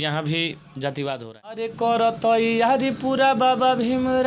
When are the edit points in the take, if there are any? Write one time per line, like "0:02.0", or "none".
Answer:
0:01.7